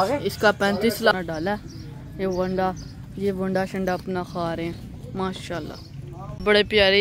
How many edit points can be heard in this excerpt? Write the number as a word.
one